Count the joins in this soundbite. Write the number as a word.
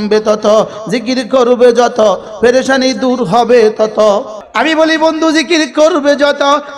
one